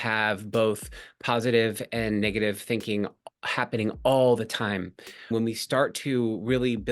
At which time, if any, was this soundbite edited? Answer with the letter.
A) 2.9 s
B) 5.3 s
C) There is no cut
B